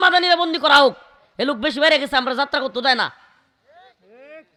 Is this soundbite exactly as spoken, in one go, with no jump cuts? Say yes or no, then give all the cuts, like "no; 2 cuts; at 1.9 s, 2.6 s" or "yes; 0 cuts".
yes; 0 cuts